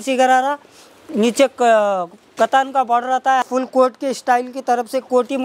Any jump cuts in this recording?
yes; 1 cut; at 3.5 s

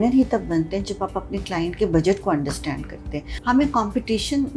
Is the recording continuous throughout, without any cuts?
no; 1 cut; at 3.3 s

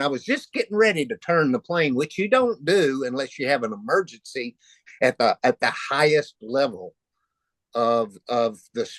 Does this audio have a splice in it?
yes; 1 cut; at 4.7 s

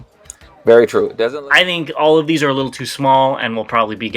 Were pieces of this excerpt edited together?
yes; 1 cut; at 1.1 s

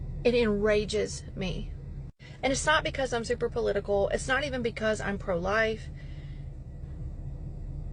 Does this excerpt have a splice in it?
no; 0 cuts

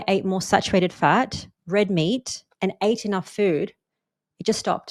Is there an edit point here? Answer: no; 0 cuts

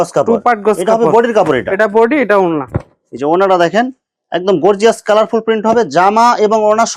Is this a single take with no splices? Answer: yes; 0 cuts

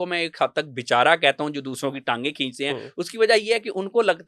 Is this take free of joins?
yes; 0 cuts

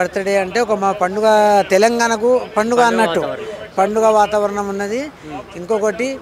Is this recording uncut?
yes; 0 cuts

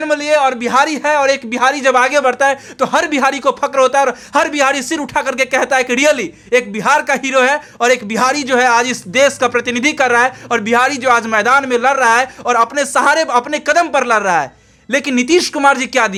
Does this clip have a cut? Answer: no; 0 cuts

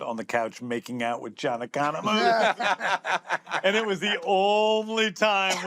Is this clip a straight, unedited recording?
yes; 0 cuts

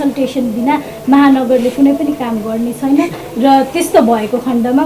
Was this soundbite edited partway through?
no; 0 cuts

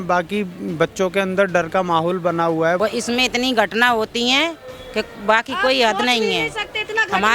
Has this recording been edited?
yes; 1 cut; at 2.8 s

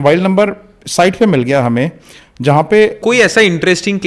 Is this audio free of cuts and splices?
no; 1 cut; at 3.0 s

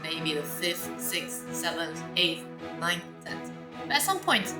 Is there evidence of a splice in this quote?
no; 0 cuts

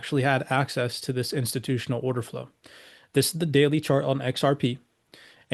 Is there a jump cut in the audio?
no; 0 cuts

